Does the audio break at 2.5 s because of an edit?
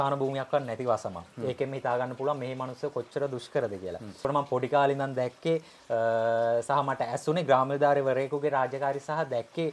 no; 1 cut; at 4.2 s

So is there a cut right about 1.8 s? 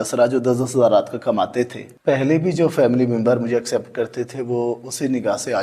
yes; 1 cut; at 1.8 s

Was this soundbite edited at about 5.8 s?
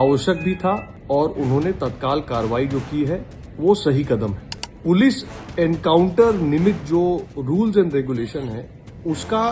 no; 1 cut; at 4.5 s

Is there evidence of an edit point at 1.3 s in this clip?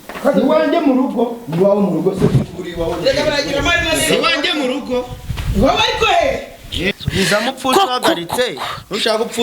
no; 1 cut; at 6.9 s

